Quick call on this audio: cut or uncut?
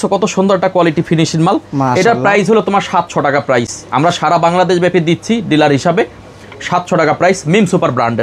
uncut